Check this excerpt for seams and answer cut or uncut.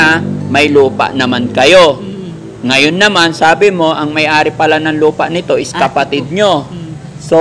uncut